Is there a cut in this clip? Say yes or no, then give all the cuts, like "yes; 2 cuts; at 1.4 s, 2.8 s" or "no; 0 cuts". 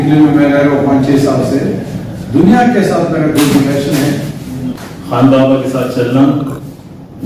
yes; 1 cut; at 4.8 s